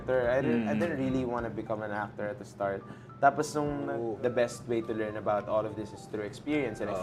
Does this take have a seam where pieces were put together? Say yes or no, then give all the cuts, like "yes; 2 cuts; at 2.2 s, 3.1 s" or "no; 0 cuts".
yes; 1 cut; at 3.9 s